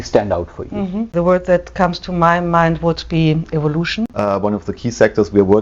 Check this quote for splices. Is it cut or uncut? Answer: cut